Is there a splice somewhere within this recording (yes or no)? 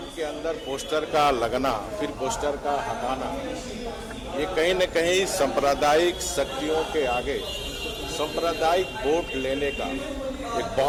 no